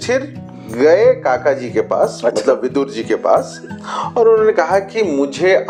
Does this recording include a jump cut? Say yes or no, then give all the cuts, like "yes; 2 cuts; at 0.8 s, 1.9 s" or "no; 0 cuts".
no; 0 cuts